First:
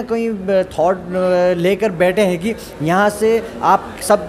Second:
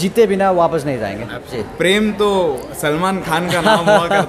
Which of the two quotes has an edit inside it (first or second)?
second